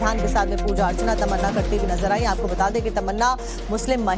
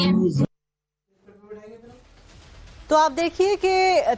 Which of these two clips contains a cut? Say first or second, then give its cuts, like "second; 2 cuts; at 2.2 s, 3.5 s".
first; 1 cut; at 3.2 s